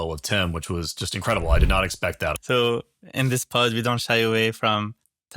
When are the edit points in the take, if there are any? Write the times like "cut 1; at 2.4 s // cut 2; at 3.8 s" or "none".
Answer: cut 1; at 2.4 s